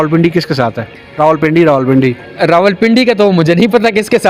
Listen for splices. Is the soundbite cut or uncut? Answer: uncut